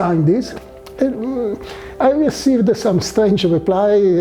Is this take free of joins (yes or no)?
yes